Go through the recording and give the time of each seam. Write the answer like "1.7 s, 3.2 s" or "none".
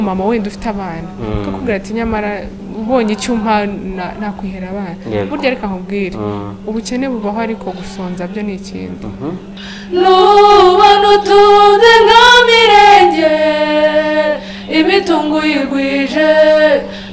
9.5 s